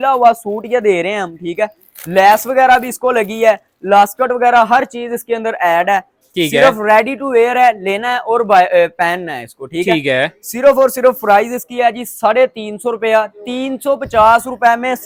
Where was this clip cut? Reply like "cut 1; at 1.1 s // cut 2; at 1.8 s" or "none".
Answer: none